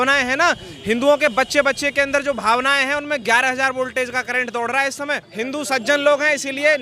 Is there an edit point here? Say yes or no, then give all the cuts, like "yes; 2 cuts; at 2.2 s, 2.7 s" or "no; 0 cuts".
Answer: yes; 1 cut; at 5.3 s